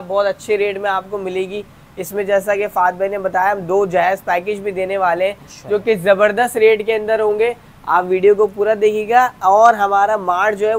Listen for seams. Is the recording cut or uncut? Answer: uncut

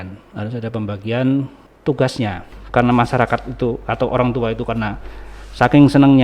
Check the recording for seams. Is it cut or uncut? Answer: cut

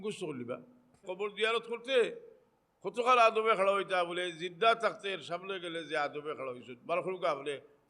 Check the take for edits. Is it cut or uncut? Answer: cut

